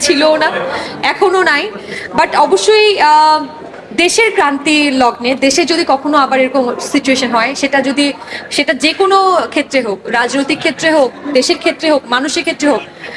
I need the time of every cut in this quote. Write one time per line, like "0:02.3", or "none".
none